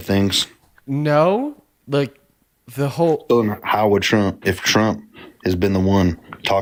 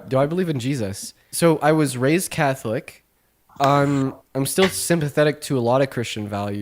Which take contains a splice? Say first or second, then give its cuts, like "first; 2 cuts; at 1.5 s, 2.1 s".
second; 1 cut; at 1.3 s